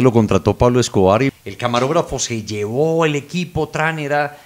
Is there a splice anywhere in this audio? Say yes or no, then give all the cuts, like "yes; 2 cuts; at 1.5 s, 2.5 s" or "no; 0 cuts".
yes; 1 cut; at 1.3 s